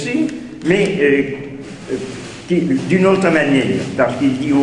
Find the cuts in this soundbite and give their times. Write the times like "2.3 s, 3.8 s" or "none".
none